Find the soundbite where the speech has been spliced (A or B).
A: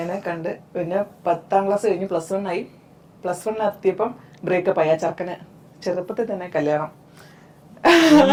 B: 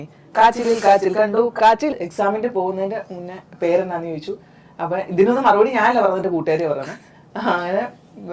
B